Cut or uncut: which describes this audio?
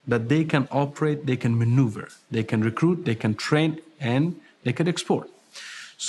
uncut